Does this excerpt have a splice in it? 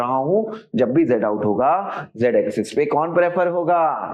no; 0 cuts

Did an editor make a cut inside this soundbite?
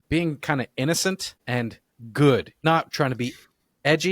yes; 1 cut; at 2.6 s

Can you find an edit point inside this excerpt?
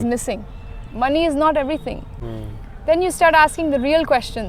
no; 0 cuts

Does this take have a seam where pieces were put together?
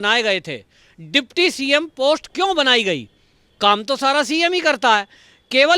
no; 0 cuts

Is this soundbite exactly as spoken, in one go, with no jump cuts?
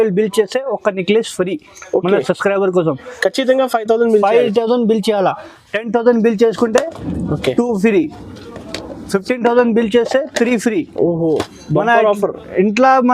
yes; 0 cuts

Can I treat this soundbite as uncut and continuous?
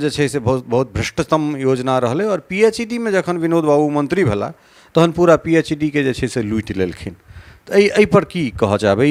yes; 0 cuts

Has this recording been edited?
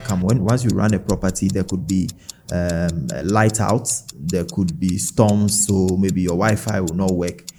no; 0 cuts

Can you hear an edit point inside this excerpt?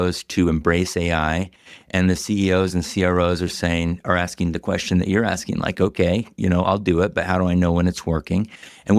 no; 0 cuts

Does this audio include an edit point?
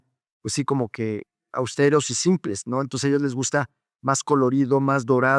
no; 0 cuts

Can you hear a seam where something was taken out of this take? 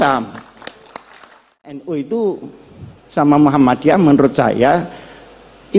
yes; 1 cut; at 1.8 s

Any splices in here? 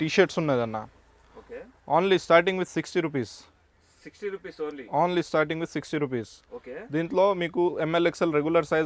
no; 0 cuts

